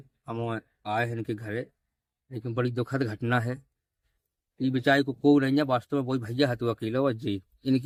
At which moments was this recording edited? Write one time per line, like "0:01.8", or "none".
none